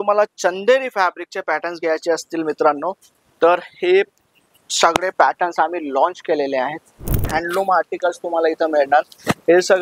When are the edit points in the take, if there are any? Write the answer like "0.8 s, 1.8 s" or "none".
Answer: 7.2 s